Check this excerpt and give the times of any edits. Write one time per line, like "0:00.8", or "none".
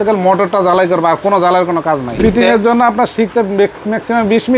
0:02.2